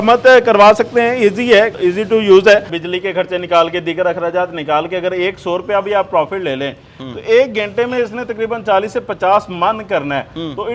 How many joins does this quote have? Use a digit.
2